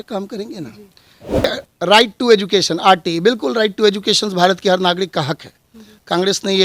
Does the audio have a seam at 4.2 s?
no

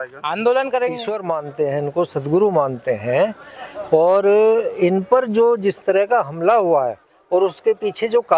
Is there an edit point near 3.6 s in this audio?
no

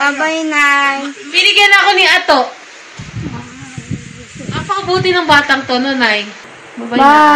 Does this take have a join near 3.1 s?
no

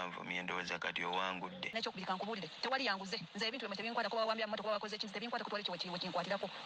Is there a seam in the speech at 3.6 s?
no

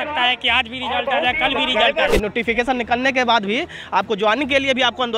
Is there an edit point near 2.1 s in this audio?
yes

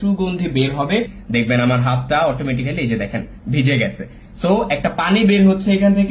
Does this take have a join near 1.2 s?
yes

